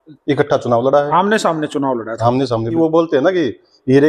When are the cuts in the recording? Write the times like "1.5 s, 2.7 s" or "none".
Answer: 2.7 s